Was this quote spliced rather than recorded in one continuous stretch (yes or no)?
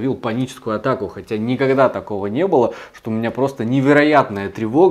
no